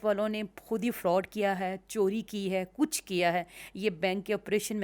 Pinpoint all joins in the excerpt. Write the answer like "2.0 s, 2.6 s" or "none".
none